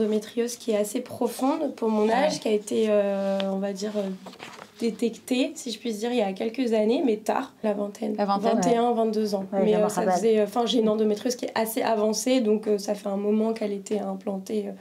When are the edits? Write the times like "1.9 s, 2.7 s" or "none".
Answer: none